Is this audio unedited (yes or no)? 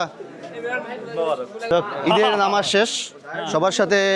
no